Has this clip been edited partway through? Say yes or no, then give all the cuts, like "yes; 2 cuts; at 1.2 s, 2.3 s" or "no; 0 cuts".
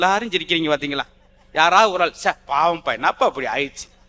no; 0 cuts